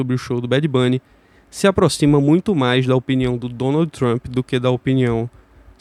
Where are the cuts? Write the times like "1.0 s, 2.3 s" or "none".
none